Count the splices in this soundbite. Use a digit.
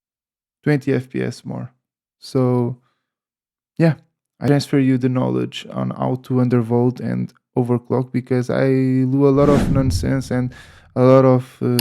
1